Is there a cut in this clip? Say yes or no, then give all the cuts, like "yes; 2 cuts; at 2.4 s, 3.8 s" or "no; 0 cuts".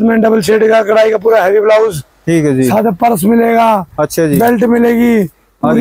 no; 0 cuts